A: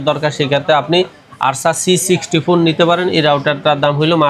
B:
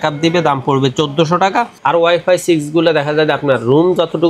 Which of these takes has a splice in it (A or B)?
B